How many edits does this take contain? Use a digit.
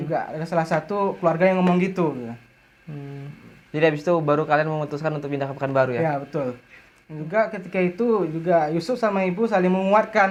0